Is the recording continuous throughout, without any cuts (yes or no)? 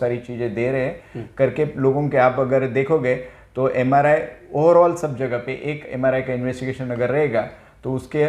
yes